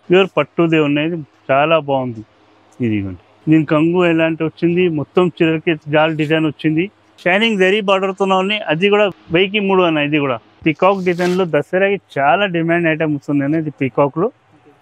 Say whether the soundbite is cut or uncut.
cut